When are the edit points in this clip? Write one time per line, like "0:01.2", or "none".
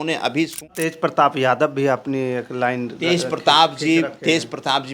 0:00.9